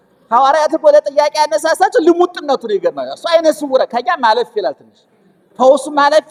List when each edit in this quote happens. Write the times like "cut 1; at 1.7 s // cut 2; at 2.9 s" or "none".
none